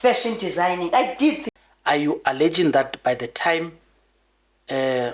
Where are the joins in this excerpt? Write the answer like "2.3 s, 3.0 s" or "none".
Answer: 1.4 s